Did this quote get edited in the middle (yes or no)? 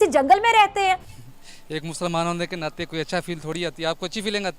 yes